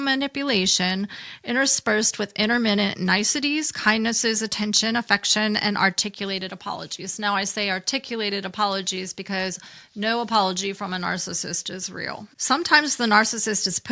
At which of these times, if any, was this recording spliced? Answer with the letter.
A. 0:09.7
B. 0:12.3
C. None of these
B